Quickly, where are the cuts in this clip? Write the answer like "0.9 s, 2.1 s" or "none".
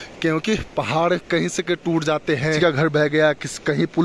2.6 s

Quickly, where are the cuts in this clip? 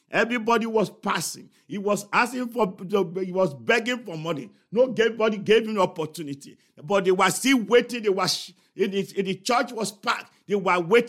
none

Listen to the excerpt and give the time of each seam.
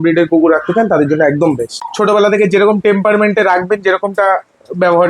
1.8 s

